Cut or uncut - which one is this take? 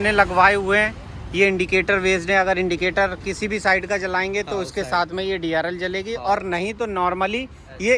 uncut